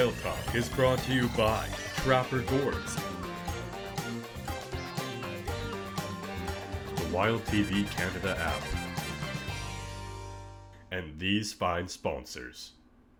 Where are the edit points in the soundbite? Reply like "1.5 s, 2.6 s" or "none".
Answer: none